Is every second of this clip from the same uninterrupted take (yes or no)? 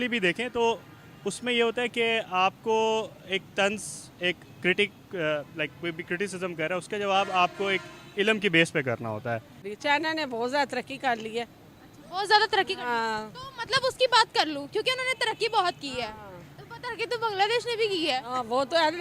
no